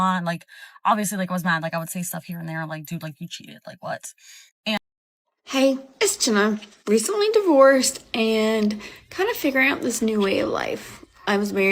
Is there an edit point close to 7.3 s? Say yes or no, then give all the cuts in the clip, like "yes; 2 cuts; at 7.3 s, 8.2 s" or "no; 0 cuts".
no; 1 cut; at 4.8 s